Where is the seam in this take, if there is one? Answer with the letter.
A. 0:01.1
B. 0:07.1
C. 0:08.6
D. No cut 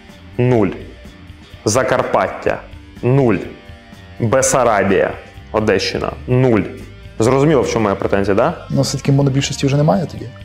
C